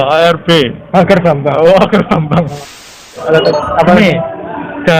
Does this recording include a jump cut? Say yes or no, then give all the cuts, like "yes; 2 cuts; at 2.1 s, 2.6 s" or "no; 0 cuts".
yes; 1 cut; at 3.2 s